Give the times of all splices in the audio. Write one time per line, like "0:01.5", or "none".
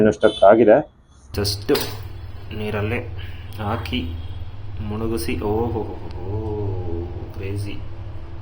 0:01.2